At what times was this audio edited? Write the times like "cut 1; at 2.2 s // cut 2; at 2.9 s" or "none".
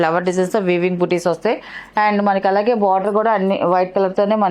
none